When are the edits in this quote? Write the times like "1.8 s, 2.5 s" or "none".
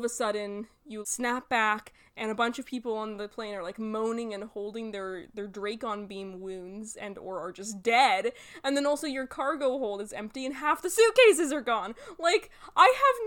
0.9 s